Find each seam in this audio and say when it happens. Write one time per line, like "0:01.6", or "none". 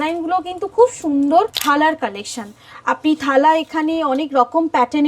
0:01.6